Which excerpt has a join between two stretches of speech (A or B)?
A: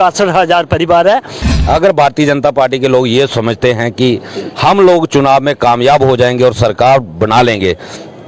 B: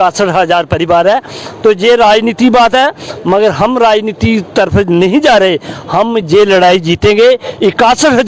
A